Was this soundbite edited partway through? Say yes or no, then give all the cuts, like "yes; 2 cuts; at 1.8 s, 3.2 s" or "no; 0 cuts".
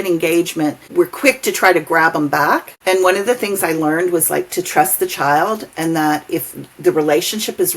yes; 2 cuts; at 0.8 s, 2.7 s